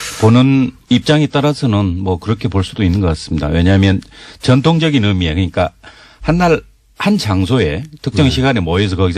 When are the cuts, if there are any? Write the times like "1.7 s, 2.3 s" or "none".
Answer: 1.0 s